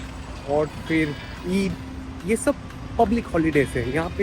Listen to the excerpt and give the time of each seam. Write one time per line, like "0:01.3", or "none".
none